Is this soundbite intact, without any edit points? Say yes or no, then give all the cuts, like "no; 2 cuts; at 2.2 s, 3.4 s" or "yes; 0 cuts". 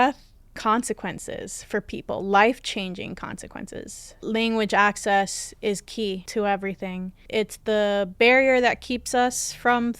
no; 3 cuts; at 4.1 s, 6.2 s, 7.2 s